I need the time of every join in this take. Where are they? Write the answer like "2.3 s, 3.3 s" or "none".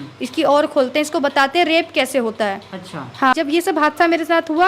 3.3 s